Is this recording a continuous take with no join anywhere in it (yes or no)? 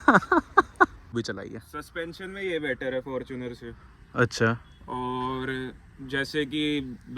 no